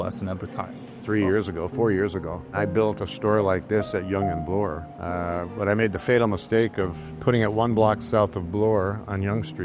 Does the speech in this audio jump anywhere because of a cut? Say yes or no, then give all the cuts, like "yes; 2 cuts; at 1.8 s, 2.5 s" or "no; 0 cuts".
no; 0 cuts